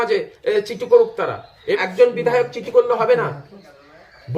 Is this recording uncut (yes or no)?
no